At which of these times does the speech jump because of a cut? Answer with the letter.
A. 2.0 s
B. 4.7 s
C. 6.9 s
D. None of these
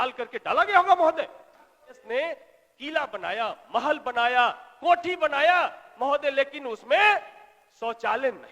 A